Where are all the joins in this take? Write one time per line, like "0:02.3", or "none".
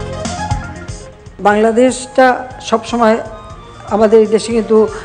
0:01.3